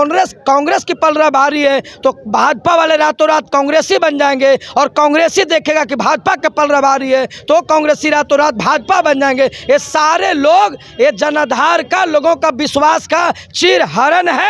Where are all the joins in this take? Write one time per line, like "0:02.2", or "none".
none